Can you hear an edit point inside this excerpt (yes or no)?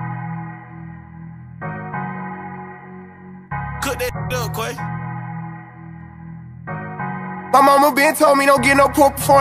yes